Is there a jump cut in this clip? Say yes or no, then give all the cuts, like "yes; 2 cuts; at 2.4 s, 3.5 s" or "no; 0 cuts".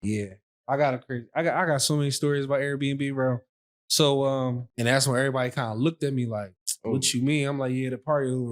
yes; 1 cut; at 4.7 s